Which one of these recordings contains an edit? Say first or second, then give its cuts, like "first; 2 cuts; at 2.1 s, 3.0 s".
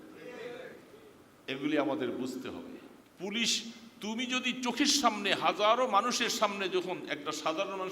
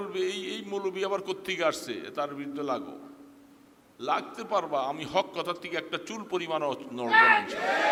first; 1 cut; at 3.0 s